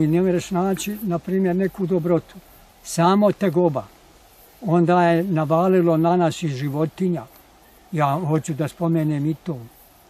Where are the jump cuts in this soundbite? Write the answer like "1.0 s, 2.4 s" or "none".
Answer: none